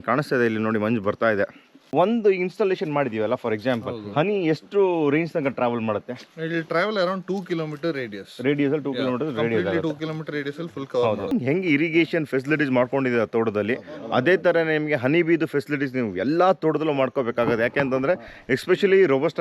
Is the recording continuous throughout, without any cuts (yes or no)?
no